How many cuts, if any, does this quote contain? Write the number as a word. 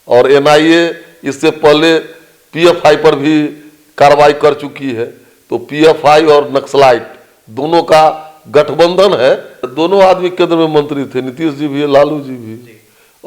one